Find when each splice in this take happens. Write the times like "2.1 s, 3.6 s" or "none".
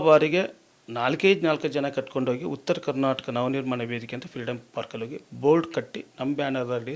none